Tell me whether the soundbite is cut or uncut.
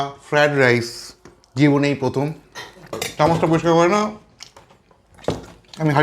cut